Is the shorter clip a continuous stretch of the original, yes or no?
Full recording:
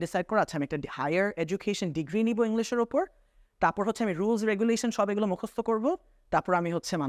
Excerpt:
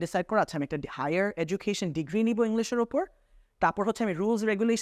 yes